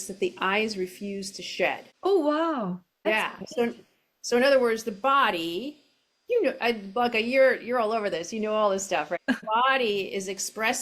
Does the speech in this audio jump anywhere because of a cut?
yes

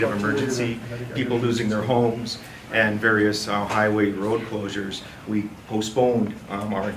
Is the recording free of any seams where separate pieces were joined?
yes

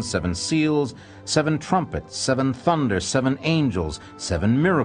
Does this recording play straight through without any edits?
no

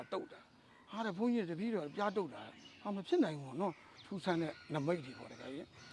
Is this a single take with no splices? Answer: no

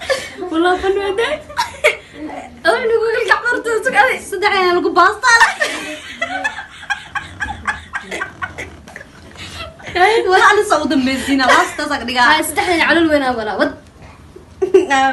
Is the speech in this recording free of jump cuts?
yes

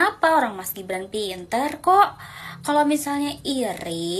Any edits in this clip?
no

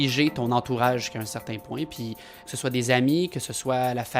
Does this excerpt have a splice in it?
yes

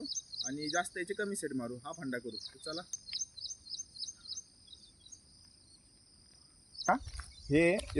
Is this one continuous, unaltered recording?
no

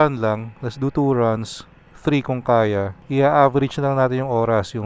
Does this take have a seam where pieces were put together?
yes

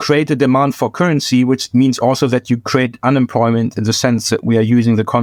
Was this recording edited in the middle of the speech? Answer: no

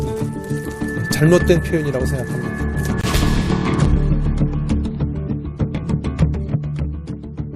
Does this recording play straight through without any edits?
no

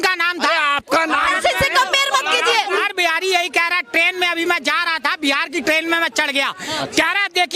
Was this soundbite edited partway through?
yes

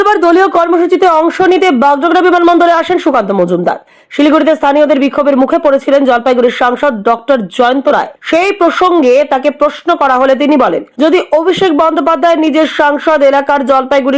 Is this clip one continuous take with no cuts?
no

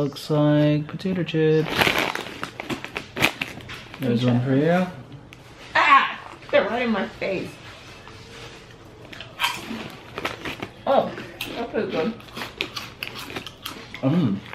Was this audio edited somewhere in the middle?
yes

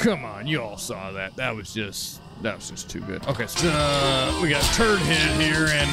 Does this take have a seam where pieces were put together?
yes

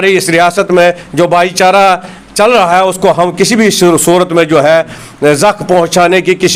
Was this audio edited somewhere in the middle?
no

